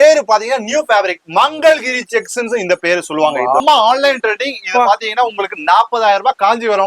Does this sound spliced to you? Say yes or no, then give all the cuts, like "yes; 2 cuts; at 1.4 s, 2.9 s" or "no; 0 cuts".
yes; 1 cut; at 3.6 s